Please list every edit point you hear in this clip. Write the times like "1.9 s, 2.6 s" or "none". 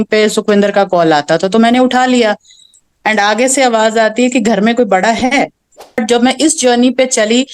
6.0 s